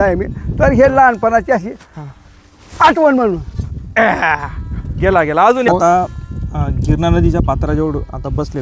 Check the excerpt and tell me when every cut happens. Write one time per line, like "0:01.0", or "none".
0:05.7